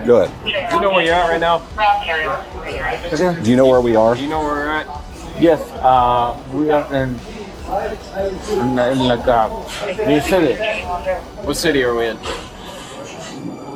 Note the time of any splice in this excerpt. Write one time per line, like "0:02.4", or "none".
none